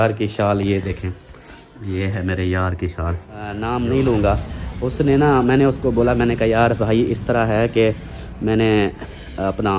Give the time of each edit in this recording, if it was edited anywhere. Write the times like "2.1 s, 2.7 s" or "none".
3.5 s